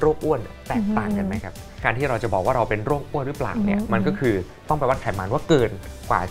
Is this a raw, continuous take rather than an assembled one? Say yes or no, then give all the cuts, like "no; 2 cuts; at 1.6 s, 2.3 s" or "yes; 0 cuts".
no; 1 cut; at 1.8 s